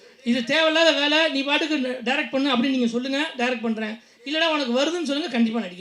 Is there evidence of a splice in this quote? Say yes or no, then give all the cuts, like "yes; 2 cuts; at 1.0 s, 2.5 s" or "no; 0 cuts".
no; 0 cuts